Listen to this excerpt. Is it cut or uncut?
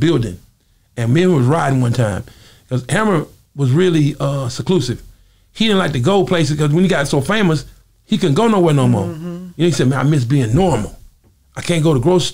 uncut